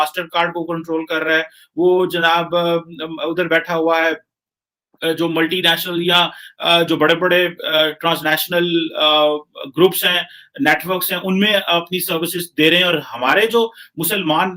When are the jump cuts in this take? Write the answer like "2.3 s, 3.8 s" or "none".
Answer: none